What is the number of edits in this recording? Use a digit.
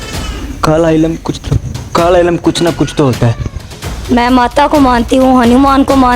1